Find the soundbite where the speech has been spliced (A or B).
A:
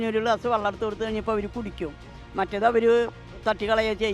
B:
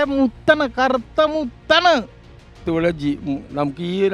B